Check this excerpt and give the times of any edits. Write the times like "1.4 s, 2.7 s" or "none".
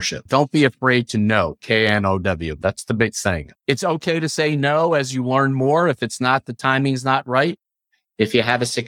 none